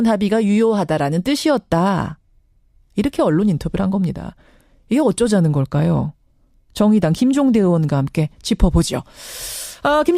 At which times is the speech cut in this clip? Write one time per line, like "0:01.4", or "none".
0:05.0